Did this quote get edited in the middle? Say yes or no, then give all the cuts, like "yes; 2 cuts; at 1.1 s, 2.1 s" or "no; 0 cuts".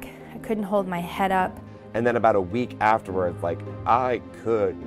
yes; 1 cut; at 1.6 s